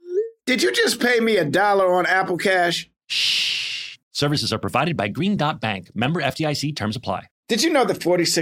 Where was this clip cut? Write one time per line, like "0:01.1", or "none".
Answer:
0:07.3